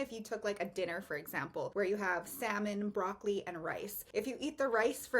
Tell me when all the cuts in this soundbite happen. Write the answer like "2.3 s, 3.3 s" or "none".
1.7 s, 3.9 s